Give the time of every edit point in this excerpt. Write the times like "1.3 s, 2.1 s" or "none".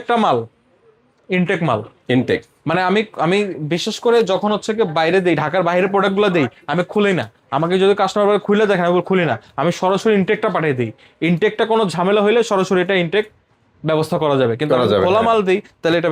none